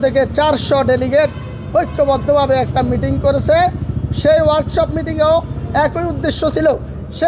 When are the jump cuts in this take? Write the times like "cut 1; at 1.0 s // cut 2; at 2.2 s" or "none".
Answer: none